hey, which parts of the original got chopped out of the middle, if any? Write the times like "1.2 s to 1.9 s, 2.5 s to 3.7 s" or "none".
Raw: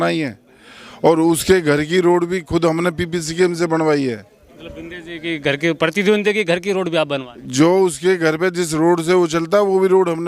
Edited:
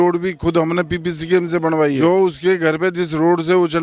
4.1 s to 7.6 s